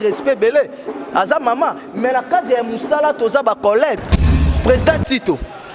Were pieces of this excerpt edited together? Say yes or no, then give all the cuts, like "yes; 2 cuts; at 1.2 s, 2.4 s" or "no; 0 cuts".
yes; 1 cut; at 4.4 s